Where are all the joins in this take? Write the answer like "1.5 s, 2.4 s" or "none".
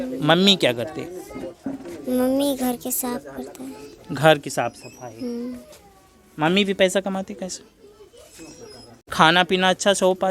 9.0 s